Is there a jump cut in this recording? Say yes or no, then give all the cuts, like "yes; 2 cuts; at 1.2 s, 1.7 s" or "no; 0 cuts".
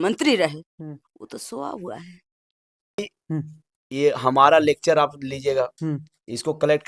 yes; 1 cut; at 3.0 s